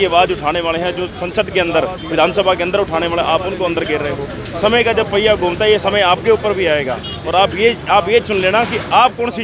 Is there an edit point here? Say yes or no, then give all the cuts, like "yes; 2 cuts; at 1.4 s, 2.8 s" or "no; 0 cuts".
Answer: no; 0 cuts